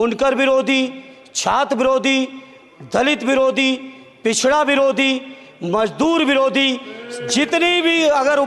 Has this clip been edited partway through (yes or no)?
no